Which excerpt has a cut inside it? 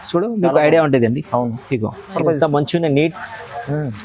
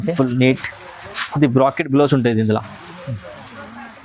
first; 1 cut; at 2.1 s

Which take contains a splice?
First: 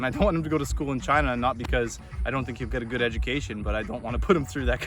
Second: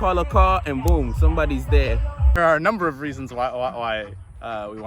second; 1 cut; at 2.4 s

